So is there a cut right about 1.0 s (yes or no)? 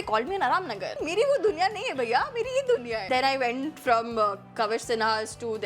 yes